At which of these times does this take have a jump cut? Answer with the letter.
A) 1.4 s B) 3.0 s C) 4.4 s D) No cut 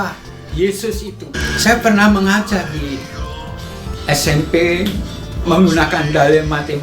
A